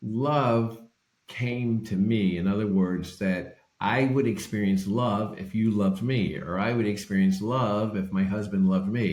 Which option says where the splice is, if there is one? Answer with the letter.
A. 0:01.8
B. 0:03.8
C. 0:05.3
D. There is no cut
D